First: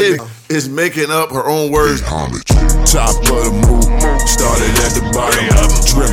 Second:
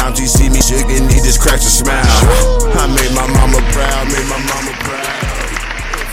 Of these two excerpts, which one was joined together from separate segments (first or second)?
first